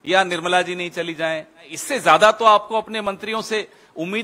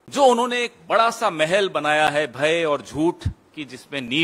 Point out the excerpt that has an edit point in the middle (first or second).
first